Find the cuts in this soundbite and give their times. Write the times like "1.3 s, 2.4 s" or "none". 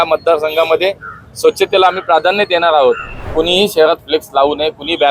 3.1 s